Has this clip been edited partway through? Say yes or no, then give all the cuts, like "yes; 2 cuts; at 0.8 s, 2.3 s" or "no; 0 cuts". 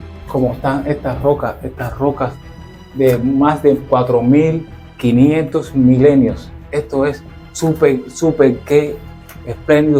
no; 0 cuts